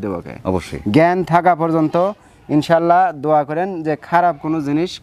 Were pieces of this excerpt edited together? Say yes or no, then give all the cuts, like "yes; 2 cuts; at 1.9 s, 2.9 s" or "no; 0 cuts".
no; 0 cuts